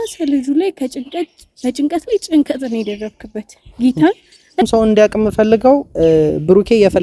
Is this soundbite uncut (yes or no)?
no